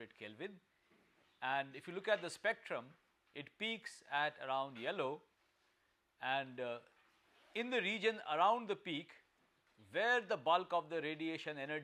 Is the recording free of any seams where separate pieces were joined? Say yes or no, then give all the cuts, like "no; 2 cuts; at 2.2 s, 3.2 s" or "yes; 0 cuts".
yes; 0 cuts